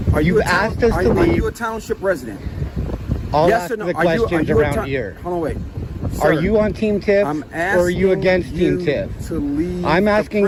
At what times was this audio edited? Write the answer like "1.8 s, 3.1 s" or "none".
none